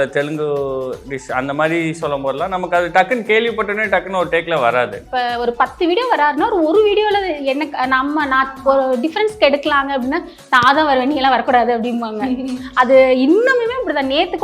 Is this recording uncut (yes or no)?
no